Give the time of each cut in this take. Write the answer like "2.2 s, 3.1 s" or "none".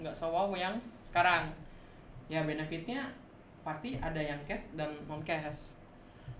none

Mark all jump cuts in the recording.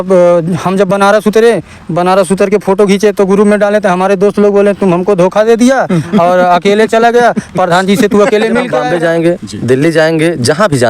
8.7 s

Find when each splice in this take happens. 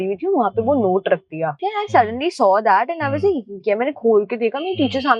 1.6 s

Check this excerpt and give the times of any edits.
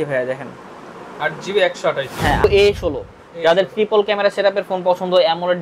2.4 s

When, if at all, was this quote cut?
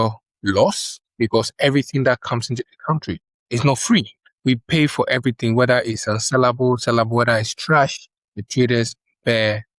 none

